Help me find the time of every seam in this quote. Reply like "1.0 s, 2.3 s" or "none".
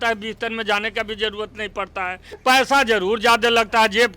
2.2 s